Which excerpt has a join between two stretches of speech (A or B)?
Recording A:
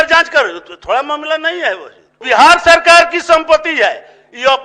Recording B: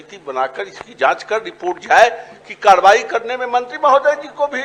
A